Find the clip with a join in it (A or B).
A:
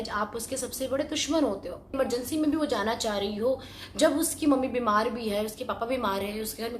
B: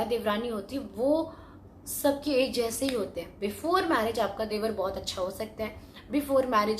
A